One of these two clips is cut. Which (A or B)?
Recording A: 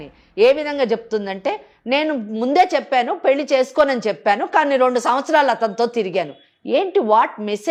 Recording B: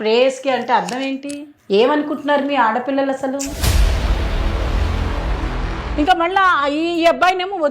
B